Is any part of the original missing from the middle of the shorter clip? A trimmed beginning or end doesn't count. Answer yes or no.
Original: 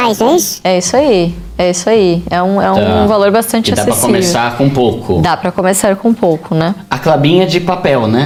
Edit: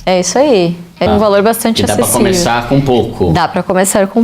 yes